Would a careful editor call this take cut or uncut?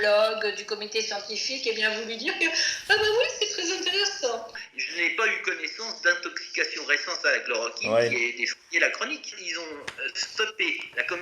cut